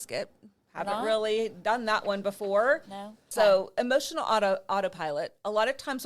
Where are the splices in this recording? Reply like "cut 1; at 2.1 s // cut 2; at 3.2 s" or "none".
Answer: cut 1; at 3.2 s